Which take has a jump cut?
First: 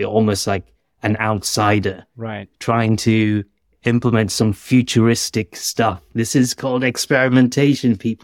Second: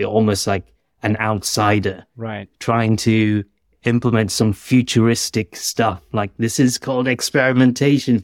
first; 1 cut; at 6.1 s

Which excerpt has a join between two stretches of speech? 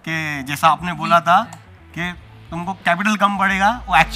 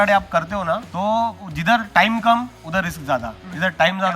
second; 3 cuts; at 0.9 s, 1.5 s, 3.0 s

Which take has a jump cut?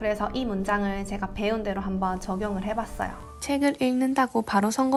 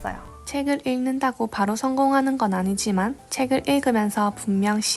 second; 1 cut; at 3.2 s

